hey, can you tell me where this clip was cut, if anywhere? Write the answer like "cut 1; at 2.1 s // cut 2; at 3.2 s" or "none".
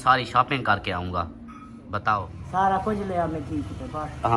cut 1; at 2.4 s